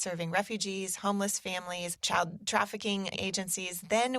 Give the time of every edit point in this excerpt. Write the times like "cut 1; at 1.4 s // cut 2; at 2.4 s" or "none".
cut 1; at 1.9 s // cut 2; at 3.1 s